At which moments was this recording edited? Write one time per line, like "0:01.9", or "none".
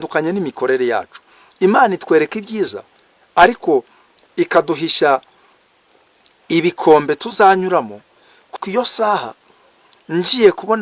0:08.5

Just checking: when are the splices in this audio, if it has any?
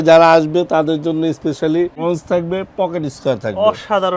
0:02.0

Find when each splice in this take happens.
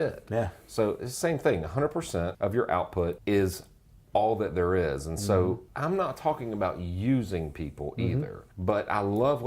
0:02.3
0:03.2
0:05.7
0:08.4

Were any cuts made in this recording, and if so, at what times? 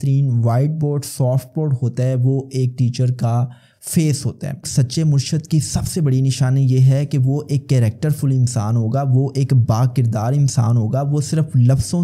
0:04.7

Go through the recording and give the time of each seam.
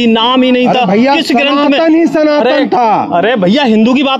none

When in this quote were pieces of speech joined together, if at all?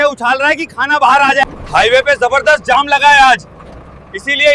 0:01.4

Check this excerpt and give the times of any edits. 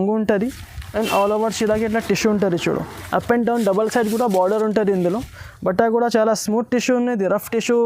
none

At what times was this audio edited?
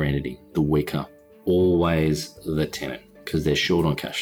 0:01.1

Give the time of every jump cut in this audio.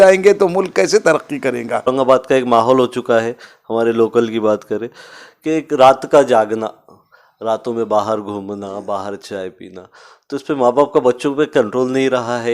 0:01.9

